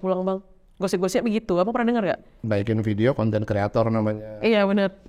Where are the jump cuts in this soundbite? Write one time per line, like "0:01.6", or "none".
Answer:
0:02.4